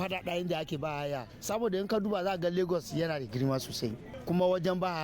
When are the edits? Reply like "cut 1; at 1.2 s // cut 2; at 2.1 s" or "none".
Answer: cut 1; at 1.3 s